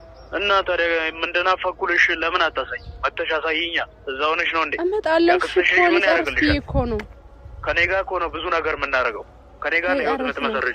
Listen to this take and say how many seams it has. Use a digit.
0